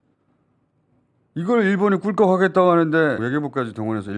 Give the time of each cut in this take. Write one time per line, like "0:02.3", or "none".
0:03.2